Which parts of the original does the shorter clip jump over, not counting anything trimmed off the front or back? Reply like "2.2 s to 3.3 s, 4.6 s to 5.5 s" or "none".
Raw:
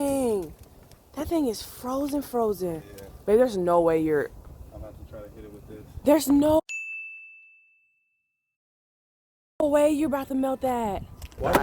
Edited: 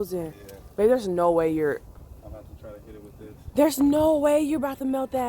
6.6 s to 9.6 s

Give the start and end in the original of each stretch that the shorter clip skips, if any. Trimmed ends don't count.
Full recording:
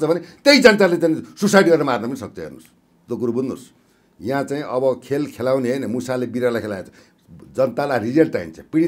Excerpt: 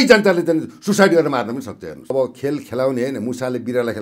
2.6 s to 4.8 s

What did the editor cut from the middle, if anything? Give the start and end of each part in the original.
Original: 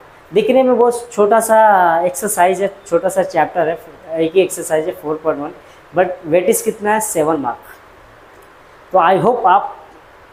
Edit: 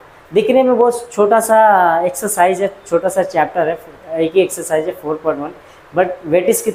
none

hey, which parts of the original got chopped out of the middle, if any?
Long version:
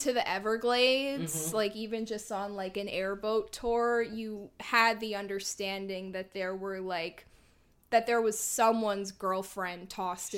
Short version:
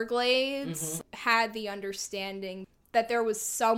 1.5 s to 4.4 s, 6.1 s to 7.7 s

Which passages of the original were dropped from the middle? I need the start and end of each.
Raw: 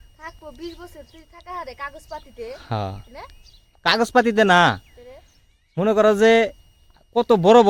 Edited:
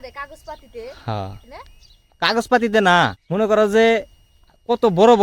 4.8 s to 5.7 s

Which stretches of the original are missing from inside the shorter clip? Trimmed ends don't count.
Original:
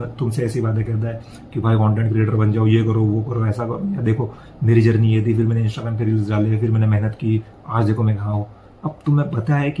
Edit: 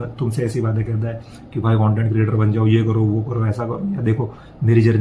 none

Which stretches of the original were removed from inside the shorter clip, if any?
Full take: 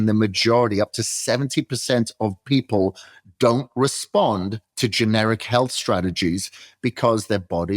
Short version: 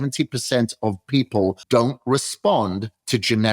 3.0 s to 3.3 s

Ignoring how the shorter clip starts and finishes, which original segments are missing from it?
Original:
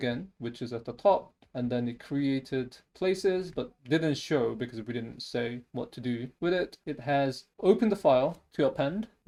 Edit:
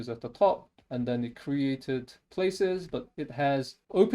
3.7 s to 6.8 s

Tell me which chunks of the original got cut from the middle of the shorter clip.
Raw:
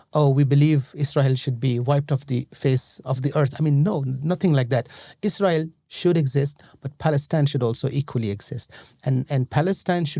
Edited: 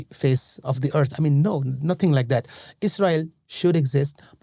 none

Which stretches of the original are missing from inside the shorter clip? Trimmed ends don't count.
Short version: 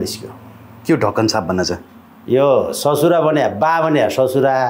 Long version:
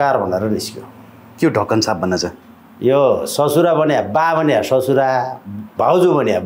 none

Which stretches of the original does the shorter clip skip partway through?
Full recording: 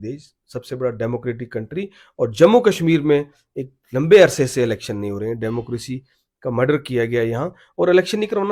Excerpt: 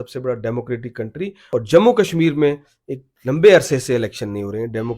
1.9 s to 2.1 s

